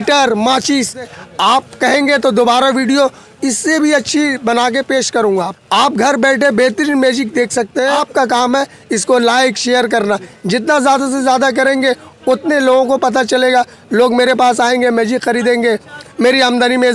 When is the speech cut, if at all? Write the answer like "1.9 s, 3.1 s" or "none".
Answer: 1.2 s, 5.5 s, 8.0 s

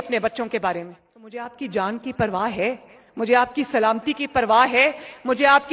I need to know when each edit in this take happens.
1.5 s

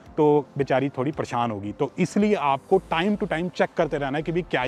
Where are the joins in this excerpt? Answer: none

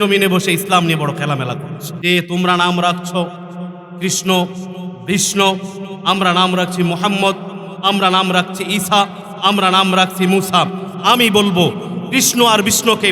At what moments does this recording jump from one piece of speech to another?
1.9 s

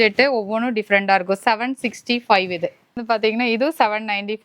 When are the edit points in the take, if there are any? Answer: 3.0 s

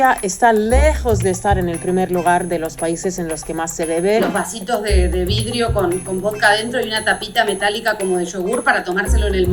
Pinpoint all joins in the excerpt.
4.2 s

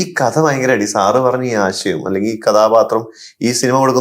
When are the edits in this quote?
none

